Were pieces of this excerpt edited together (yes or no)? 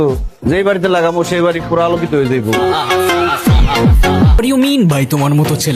yes